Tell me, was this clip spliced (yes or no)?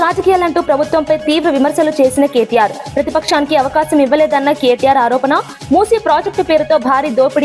no